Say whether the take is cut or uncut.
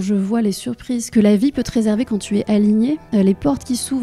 cut